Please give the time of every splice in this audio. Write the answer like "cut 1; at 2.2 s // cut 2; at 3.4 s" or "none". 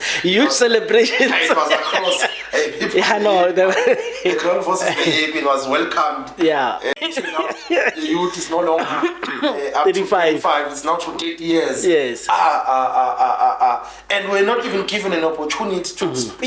cut 1; at 6.9 s